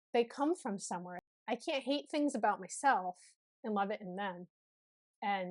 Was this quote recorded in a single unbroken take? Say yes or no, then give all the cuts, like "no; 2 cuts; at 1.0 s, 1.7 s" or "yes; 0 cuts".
no; 1 cut; at 1.1 s